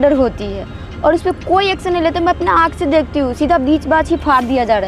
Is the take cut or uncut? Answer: uncut